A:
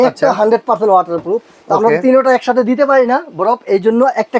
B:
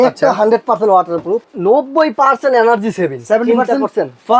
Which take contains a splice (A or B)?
B